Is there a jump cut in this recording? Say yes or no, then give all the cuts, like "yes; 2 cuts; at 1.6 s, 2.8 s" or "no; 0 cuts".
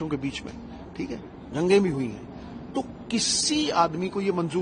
no; 0 cuts